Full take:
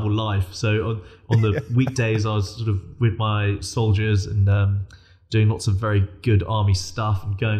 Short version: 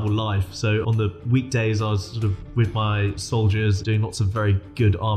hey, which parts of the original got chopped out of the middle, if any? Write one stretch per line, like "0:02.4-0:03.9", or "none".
0:00.9-0:01.3
0:04.2-0:05.3

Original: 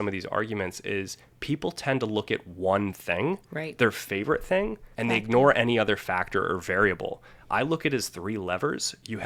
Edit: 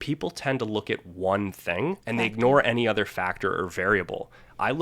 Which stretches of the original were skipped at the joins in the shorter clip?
0:03.4-0:04.9

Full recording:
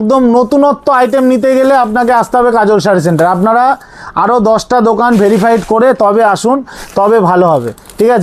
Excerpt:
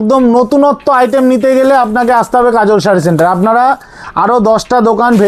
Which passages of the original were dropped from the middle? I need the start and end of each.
none

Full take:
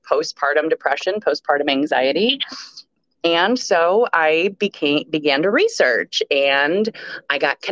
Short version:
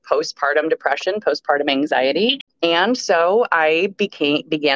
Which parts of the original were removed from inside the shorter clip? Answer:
0:02.4-0:03.1

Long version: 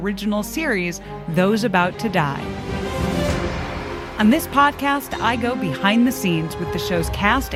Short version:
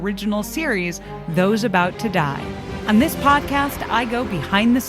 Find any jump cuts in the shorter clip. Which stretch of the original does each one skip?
0:02.7-0:04.0

